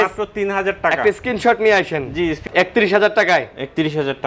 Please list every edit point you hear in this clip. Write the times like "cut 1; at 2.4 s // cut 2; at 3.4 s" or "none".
cut 1; at 2.4 s